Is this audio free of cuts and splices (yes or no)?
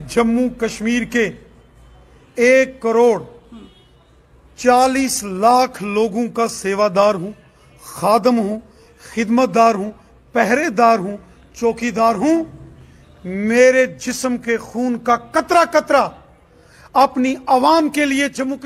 yes